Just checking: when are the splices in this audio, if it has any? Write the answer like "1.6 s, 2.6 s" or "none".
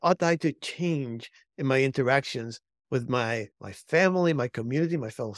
none